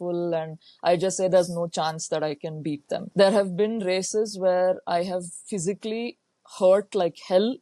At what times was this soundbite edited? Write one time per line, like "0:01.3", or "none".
0:03.1